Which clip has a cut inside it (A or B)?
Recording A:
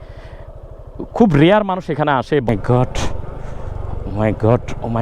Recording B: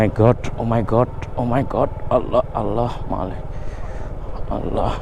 A